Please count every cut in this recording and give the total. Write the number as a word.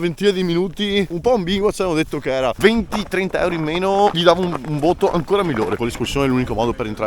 two